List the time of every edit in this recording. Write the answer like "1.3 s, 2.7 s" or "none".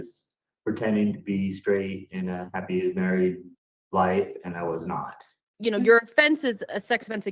5.5 s